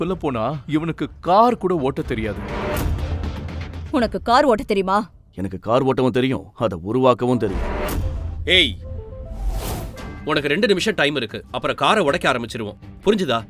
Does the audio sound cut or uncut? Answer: cut